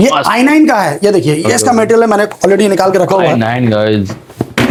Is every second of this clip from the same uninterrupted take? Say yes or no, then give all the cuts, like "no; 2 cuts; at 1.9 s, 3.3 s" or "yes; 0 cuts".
yes; 0 cuts